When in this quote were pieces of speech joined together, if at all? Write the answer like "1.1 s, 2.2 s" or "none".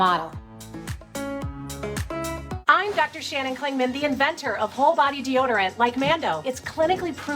2.4 s